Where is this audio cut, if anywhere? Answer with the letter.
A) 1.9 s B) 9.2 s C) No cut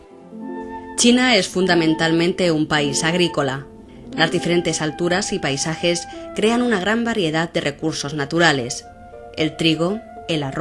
B